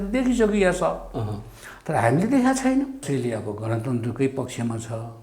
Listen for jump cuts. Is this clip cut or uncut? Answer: cut